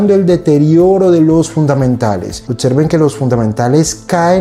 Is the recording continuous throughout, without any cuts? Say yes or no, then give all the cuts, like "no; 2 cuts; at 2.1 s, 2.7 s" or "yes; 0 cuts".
no; 1 cut; at 2.4 s